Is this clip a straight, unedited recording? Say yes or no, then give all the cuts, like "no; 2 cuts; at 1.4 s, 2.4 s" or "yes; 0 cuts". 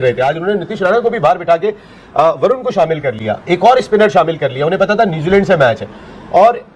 yes; 0 cuts